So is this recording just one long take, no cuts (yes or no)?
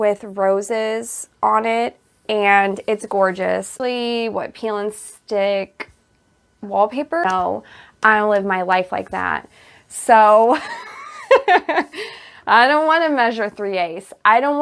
no